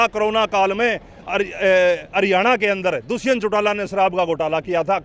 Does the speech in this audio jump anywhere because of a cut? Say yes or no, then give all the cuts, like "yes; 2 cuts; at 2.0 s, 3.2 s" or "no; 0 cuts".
no; 0 cuts